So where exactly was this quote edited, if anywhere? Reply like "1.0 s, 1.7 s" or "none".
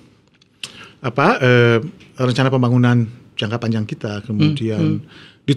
none